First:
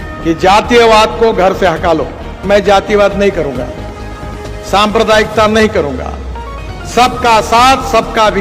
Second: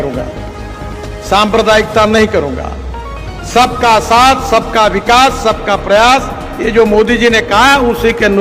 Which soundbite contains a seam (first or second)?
first